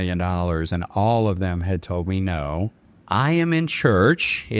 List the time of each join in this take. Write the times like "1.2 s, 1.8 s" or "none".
2.9 s